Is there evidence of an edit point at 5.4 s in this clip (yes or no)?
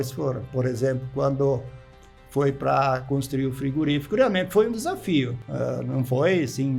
yes